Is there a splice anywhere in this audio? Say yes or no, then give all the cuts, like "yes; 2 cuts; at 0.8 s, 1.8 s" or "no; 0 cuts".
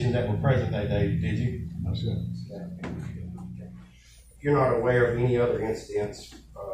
yes; 1 cut; at 3.7 s